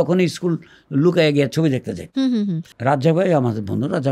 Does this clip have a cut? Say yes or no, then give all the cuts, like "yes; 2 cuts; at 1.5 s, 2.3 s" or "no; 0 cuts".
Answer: yes; 1 cut; at 2.7 s